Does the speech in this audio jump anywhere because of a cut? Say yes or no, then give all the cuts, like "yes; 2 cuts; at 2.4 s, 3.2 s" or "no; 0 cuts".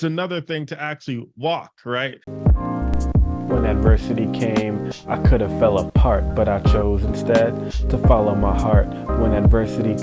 yes; 1 cut; at 2.3 s